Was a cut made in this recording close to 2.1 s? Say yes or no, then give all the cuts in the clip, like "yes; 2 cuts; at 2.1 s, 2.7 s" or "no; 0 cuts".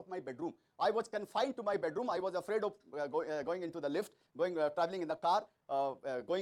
no; 0 cuts